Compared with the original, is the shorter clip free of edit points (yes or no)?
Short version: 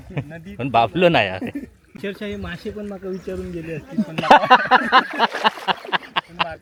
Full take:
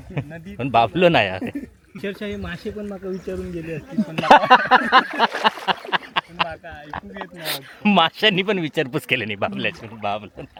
yes